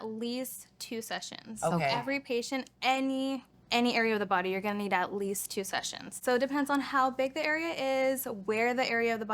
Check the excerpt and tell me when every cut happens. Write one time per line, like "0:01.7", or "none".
0:06.1